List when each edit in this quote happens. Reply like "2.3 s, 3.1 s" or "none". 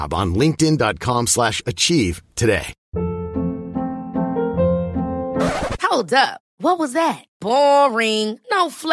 2.8 s